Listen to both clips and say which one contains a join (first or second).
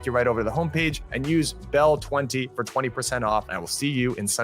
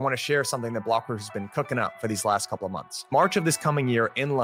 first